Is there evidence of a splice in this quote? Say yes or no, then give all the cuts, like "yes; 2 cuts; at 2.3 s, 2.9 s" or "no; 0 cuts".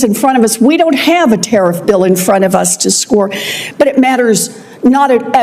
yes; 1 cut; at 3.6 s